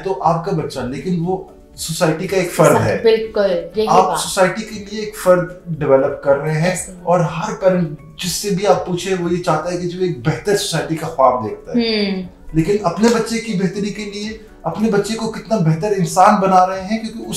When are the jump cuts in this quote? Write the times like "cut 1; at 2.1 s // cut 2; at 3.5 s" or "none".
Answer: none